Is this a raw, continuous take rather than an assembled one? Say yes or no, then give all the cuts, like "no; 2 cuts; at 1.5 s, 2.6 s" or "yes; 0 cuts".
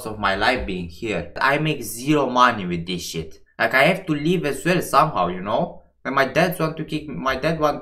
yes; 0 cuts